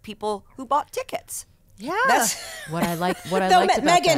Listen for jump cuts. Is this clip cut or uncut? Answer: uncut